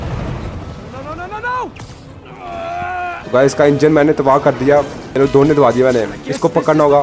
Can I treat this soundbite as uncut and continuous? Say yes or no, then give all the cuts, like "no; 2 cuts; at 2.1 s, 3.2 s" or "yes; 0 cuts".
no; 2 cuts; at 3.2 s, 5.0 s